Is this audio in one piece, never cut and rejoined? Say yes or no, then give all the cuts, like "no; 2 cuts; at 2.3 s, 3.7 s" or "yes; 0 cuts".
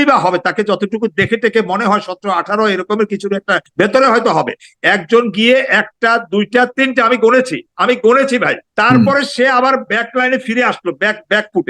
no; 2 cuts; at 3.7 s, 8.6 s